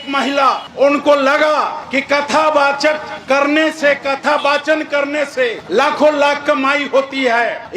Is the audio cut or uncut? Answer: uncut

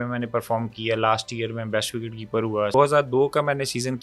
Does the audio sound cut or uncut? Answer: cut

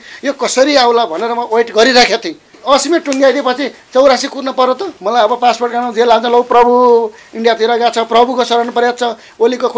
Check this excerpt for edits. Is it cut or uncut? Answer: cut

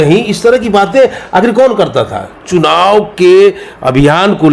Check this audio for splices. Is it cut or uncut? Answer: cut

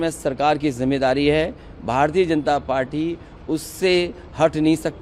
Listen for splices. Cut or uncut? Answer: uncut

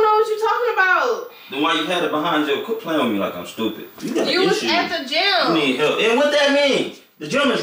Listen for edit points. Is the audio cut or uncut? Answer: cut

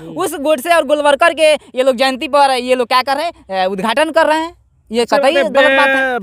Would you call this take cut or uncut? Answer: uncut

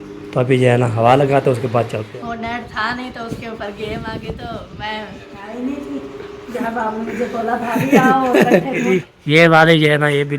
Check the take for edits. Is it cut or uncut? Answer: cut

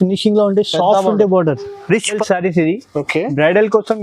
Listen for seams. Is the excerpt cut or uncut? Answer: cut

